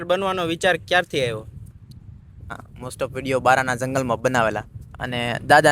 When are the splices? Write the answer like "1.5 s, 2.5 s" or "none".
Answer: 2.6 s

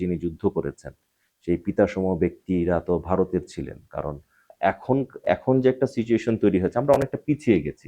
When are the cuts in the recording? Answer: 4.5 s

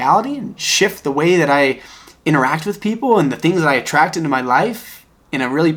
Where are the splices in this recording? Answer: none

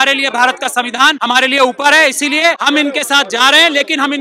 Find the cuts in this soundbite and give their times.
1.2 s, 2.6 s

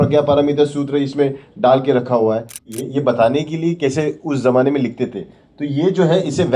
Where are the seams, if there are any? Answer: 2.7 s

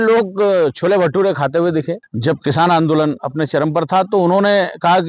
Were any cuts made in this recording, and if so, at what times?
2.0 s

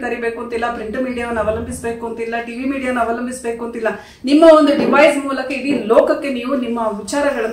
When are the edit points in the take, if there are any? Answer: none

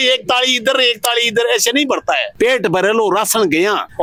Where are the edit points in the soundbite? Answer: none

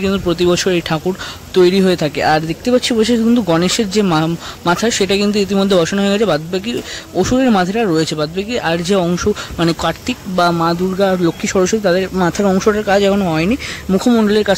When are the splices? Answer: none

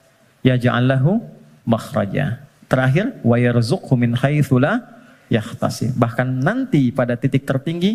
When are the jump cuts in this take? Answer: none

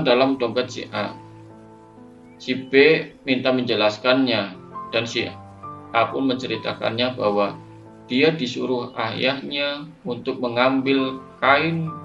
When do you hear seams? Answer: 1.1 s, 2.4 s

